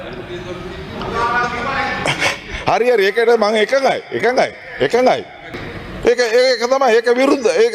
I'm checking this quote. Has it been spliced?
yes; 1 cut; at 5.5 s

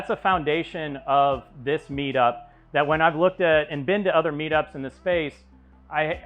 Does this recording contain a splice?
no; 0 cuts

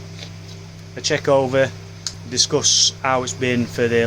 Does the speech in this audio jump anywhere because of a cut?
yes; 1 cut; at 2.1 s

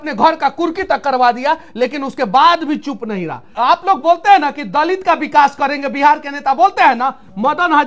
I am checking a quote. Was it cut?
yes; 1 cut; at 3.5 s

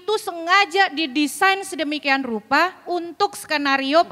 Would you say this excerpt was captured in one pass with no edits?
yes; 0 cuts

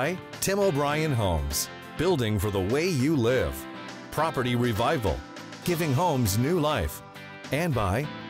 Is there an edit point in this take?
no; 0 cuts

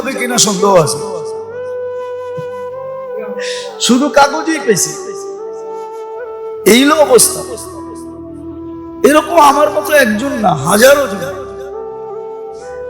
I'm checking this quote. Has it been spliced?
yes; 7 cuts; at 0.9 s, 2.5 s, 3.9 s, 4.8 s, 6.6 s, 7.2 s, 9.0 s

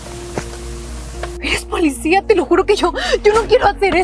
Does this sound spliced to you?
no; 0 cuts

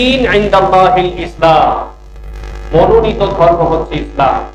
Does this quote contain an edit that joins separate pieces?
no; 0 cuts

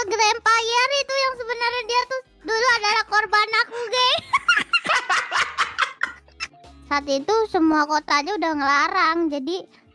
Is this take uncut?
no; 1 cut; at 6.5 s

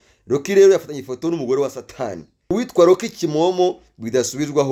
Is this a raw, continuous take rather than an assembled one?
no; 1 cut; at 2.5 s

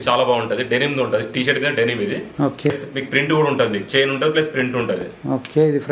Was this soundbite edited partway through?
yes; 1 cut; at 2.7 s

